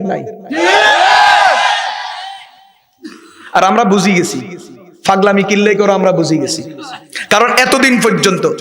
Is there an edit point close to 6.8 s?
no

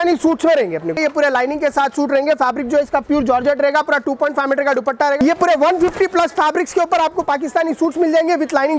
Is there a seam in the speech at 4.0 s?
no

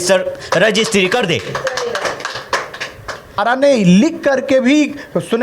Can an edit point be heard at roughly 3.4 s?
yes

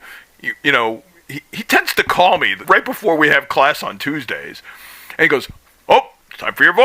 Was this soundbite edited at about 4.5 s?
no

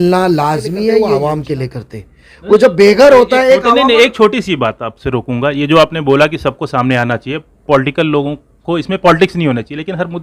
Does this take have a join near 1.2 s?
yes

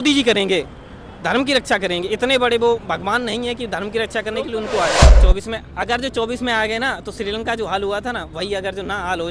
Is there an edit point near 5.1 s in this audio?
yes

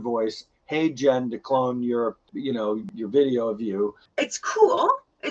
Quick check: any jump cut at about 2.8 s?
yes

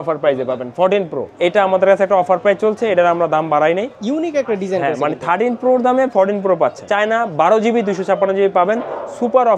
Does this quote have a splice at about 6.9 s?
yes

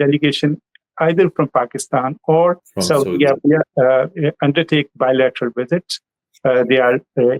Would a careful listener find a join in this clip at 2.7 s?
yes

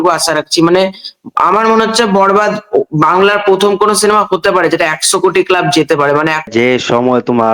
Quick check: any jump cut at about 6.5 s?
yes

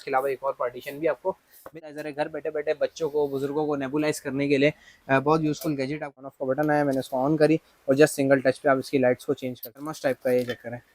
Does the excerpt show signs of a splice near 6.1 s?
yes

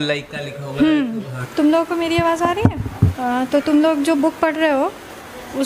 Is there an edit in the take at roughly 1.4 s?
yes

